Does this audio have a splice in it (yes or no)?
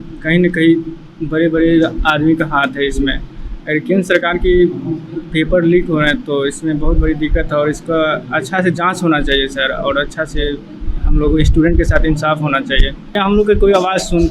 yes